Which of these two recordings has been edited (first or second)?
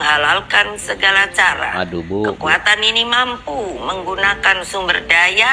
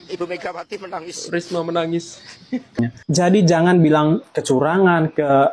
second